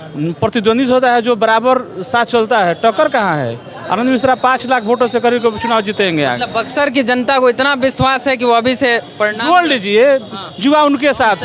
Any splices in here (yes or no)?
no